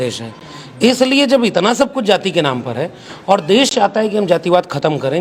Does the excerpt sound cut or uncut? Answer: uncut